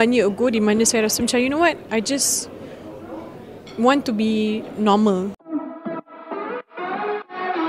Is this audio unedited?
no; 1 cut; at 5.4 s

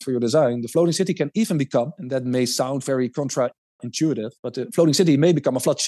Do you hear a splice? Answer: no; 0 cuts

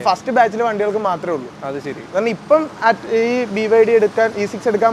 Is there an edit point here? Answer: no; 0 cuts

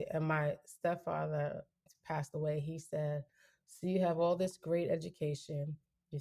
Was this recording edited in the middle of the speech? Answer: yes; 1 cut; at 1.8 s

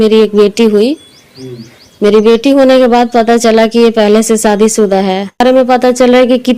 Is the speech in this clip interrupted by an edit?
yes; 1 cut; at 5.4 s

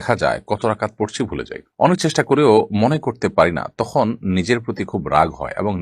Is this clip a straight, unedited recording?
yes; 0 cuts

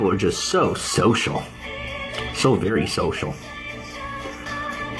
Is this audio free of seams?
yes; 0 cuts

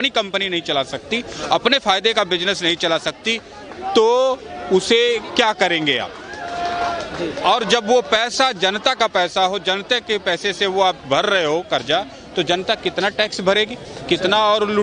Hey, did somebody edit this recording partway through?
no; 0 cuts

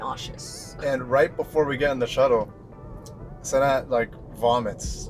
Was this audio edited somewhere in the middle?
no; 0 cuts

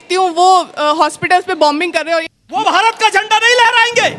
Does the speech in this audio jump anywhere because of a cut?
yes; 1 cut; at 2.3 s

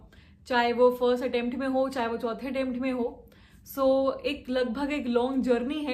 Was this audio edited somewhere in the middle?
no; 0 cuts

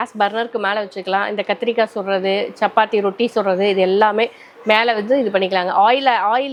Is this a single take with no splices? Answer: yes; 0 cuts

